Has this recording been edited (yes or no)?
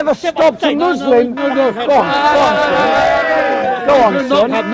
no